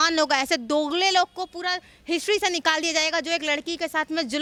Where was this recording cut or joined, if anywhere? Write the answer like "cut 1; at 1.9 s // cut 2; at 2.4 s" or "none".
none